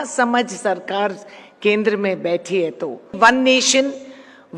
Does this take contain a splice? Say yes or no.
yes